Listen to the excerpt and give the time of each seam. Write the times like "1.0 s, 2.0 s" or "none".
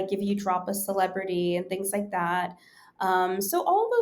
none